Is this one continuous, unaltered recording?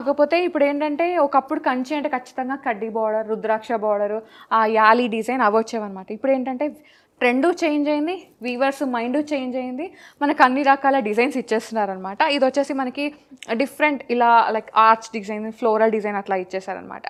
yes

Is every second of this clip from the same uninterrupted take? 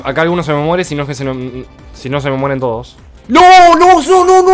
no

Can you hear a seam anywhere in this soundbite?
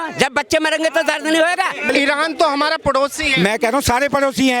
yes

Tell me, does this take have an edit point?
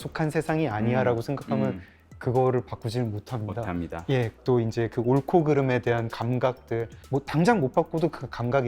yes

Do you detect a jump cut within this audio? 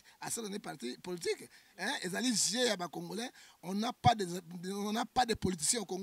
no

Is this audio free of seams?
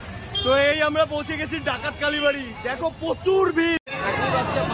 no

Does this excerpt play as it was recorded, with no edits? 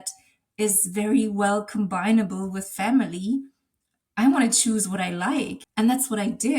no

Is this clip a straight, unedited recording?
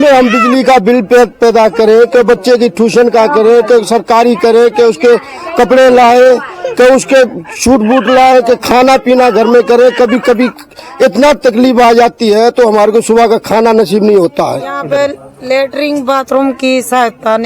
no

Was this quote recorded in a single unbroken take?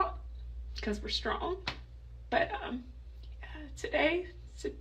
yes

